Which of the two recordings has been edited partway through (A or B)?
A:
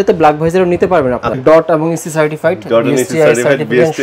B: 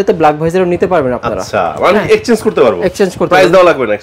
A